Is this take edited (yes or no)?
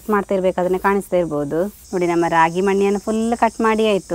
yes